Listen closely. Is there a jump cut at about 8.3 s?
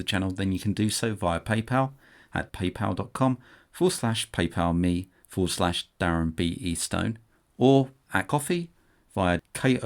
yes; 2 cuts; at 5.2 s, 8.3 s

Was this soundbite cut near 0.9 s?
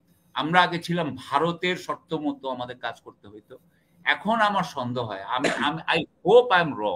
no; 0 cuts

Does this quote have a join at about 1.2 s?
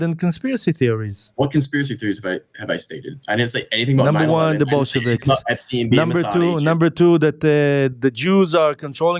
yes; 1 cut; at 1.2 s

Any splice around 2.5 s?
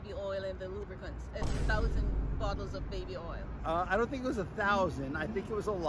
no; 0 cuts

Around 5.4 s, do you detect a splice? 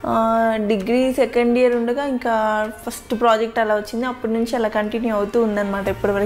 no; 0 cuts

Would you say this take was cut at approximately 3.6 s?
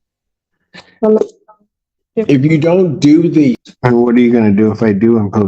yes; 1 cut; at 3.6 s

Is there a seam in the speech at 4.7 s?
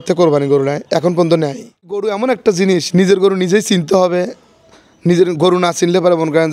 no; 1 cut; at 2.0 s

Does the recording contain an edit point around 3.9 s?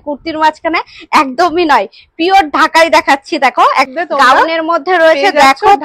yes; 1 cut; at 3.9 s

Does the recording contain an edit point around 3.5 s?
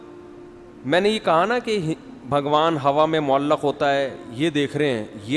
no; 0 cuts

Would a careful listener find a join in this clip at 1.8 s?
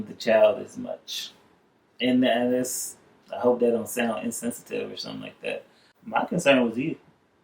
no; 1 cut; at 5.9 s

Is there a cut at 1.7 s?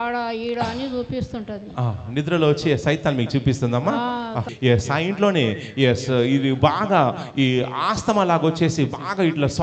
no; 1 cut; at 4.5 s

